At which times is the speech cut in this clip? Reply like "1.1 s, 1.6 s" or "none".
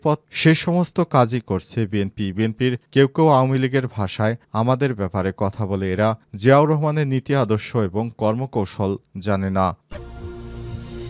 9.8 s

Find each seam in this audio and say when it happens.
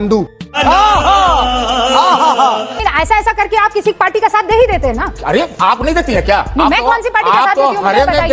2.7 s

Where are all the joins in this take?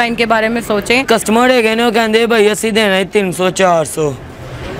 1.1 s

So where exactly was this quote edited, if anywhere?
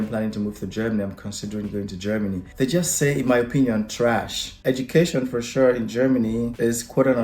4.6 s

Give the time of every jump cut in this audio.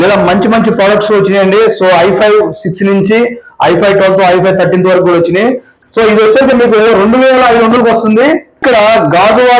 5.7 s, 8.5 s

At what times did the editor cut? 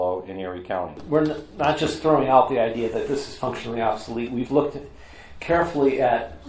1.0 s

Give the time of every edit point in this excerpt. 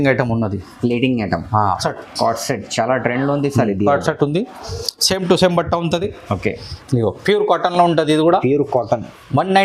1.8 s

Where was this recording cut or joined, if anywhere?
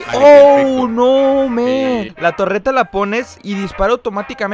2.1 s, 3.4 s

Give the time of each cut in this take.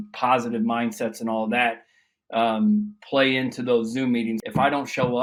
none

